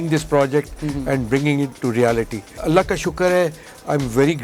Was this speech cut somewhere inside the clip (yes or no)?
yes